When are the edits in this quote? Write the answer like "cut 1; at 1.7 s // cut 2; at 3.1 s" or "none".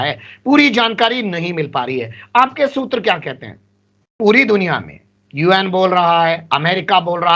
cut 1; at 4.2 s